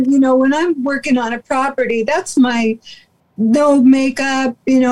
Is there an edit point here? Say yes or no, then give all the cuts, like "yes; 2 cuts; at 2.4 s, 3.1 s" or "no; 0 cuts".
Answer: no; 0 cuts